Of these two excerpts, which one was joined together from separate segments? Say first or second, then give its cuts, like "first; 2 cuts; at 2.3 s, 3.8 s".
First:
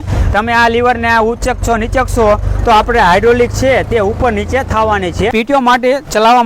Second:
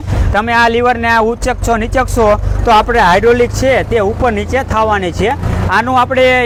first; 1 cut; at 5.3 s